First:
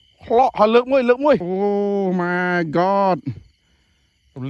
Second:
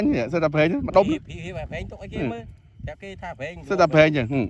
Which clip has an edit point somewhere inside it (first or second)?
first